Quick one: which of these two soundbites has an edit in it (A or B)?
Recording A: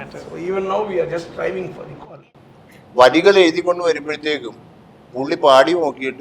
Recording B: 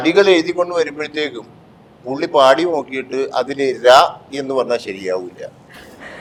A